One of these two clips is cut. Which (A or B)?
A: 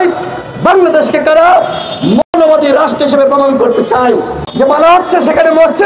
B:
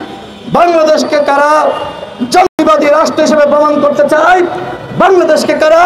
A